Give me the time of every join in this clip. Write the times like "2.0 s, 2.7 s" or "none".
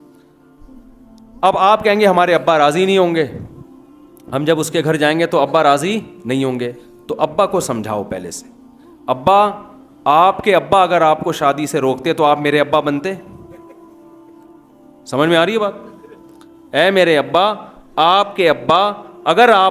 0.9 s